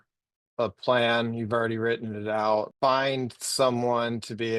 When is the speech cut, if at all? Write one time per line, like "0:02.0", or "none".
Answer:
0:02.7